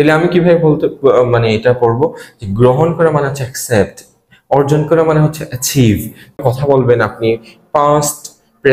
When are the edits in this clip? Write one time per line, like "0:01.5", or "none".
0:06.4